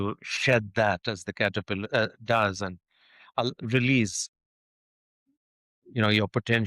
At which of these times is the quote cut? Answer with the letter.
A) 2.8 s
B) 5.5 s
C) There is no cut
C